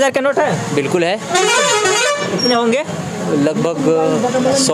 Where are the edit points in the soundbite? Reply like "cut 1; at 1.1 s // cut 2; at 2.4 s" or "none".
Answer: none